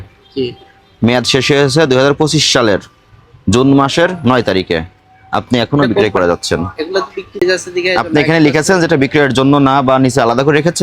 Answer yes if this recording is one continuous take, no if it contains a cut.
no